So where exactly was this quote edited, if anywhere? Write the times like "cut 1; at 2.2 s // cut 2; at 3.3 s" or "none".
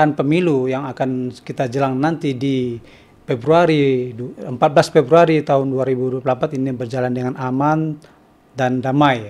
none